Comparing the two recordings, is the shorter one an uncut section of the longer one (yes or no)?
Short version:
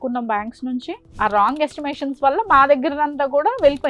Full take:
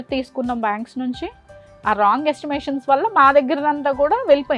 no